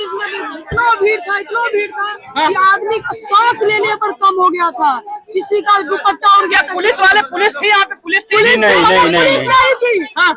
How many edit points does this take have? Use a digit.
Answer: 0